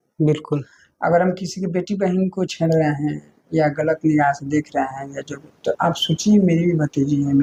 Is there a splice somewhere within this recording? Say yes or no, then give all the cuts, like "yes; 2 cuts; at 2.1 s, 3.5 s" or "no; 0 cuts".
no; 0 cuts